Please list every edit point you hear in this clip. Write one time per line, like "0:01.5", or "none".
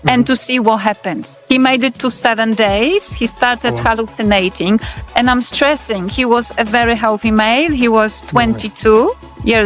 0:01.3

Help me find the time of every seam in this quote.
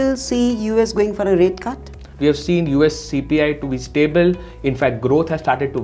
0:02.0

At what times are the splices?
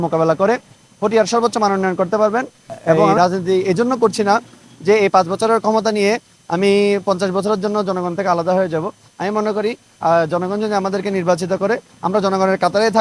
0:03.1

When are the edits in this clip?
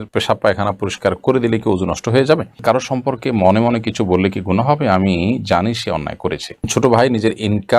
0:02.6
0:06.7

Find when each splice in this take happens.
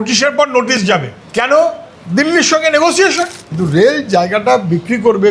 0:03.4

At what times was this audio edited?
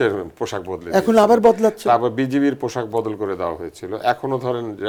none

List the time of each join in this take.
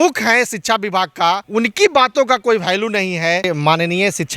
0:01.4
0:03.5

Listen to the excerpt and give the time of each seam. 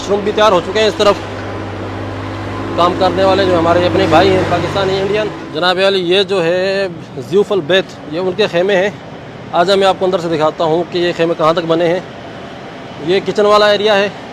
0:05.4

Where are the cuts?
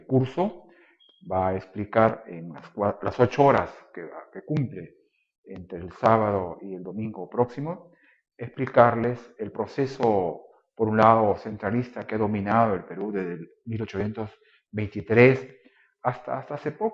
0:06.4

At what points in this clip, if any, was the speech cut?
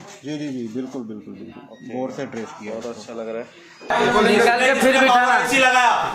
0:03.9

